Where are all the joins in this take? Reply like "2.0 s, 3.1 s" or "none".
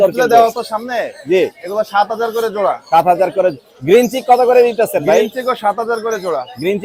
none